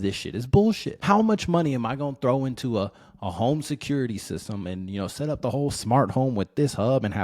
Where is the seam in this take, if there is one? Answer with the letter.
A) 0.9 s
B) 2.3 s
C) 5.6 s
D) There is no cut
A